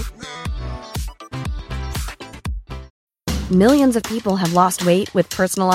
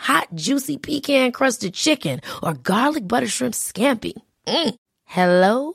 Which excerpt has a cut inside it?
first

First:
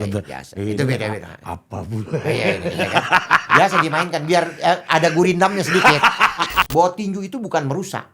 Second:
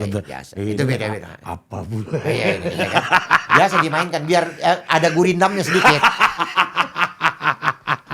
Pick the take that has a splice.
first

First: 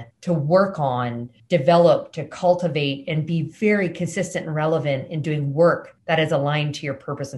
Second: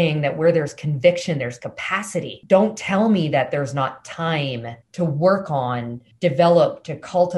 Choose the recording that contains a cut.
first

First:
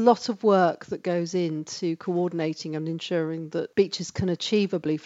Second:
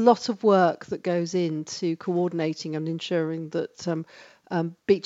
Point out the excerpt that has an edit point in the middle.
first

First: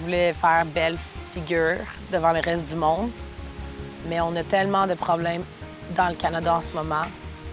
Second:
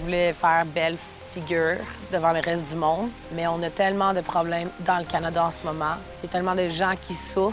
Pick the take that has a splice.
second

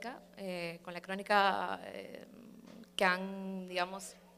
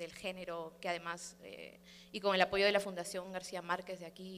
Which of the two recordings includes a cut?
second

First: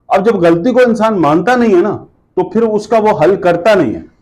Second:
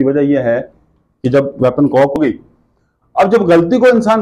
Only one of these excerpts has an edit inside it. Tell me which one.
second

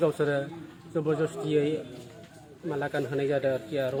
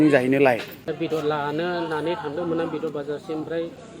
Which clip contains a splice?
second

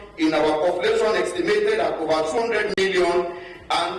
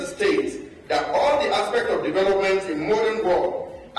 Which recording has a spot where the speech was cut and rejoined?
first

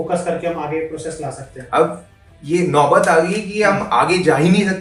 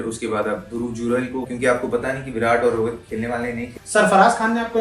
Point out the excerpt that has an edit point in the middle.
second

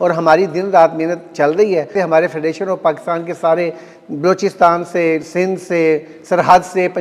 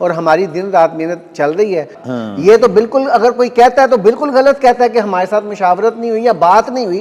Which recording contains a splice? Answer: second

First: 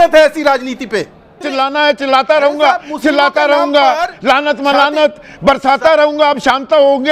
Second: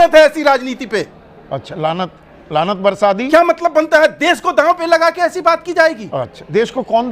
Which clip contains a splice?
first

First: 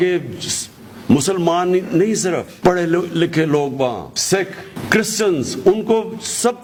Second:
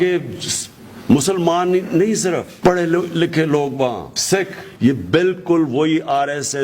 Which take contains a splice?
second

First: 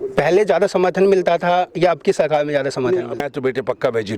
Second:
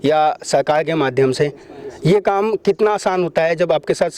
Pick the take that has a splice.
first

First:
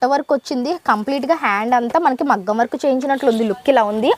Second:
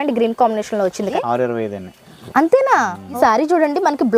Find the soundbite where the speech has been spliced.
second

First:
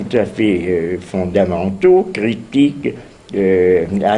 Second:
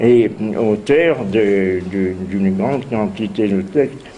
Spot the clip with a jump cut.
first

